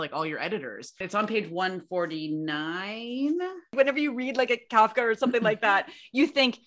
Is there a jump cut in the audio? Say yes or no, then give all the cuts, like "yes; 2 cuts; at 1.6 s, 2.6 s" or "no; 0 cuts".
yes; 2 cuts; at 1.0 s, 3.7 s